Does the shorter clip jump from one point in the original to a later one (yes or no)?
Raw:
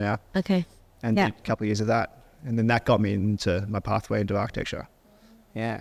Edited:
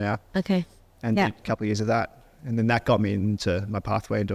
no